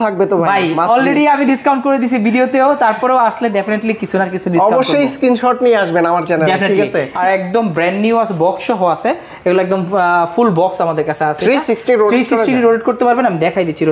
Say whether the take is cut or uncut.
cut